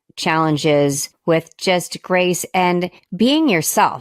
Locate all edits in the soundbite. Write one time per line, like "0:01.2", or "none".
0:01.1
0:03.0